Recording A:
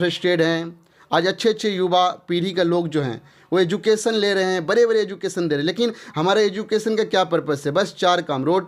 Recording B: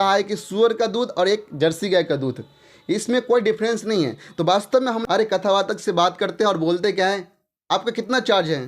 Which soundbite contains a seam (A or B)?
B